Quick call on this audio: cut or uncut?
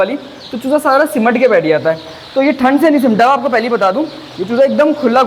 uncut